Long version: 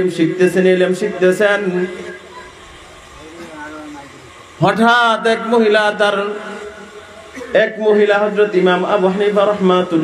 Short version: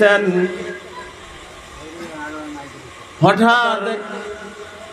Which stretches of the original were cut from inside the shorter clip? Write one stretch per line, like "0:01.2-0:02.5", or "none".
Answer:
0:05.2-0:06.2